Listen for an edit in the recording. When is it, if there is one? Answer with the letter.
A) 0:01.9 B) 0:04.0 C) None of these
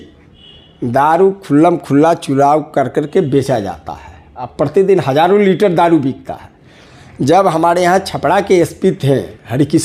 C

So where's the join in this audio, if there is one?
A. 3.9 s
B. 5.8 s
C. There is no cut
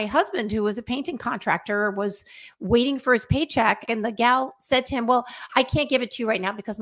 A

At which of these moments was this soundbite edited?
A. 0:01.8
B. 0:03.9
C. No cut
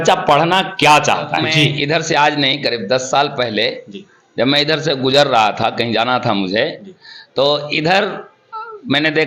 A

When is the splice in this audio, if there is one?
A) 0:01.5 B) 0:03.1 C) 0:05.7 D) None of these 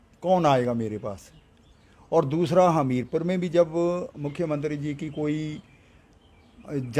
D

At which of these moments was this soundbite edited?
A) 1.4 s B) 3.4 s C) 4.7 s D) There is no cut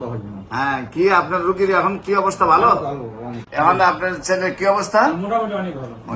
B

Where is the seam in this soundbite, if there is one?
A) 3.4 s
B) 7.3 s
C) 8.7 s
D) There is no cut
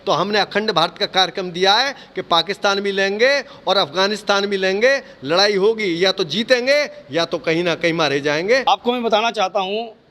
C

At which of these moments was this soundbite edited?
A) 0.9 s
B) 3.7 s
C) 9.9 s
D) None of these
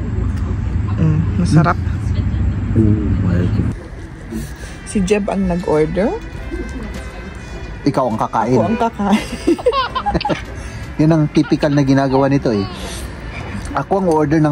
B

